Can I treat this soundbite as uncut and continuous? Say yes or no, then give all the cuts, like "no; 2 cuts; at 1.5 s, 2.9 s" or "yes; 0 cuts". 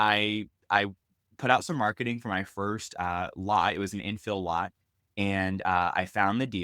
yes; 0 cuts